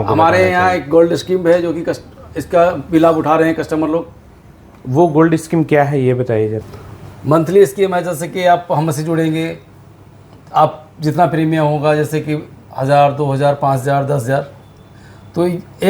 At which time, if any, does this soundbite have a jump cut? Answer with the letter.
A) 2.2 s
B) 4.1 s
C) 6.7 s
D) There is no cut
C